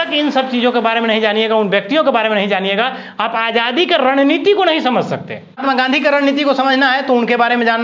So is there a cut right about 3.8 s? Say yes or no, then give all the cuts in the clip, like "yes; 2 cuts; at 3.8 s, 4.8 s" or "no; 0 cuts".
no; 1 cut; at 5.6 s